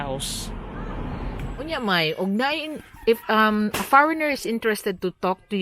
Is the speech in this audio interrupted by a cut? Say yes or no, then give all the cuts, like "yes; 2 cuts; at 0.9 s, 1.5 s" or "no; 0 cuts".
yes; 1 cut; at 1.5 s